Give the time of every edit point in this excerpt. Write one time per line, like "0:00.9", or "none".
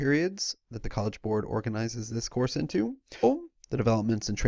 none